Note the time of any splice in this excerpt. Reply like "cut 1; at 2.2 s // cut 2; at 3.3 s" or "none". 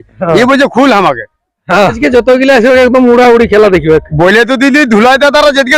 cut 1; at 1.9 s